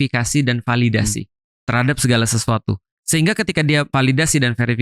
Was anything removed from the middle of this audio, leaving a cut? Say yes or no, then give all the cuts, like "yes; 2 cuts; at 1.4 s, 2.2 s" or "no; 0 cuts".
yes; 2 cuts; at 3.0 s, 3.9 s